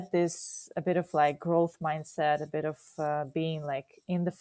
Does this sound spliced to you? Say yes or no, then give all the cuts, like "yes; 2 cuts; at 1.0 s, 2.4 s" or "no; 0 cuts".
no; 0 cuts